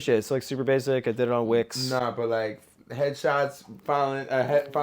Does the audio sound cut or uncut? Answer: uncut